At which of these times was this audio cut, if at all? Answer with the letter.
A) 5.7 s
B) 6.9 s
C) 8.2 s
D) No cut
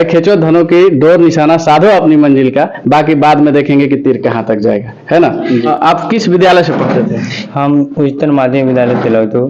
A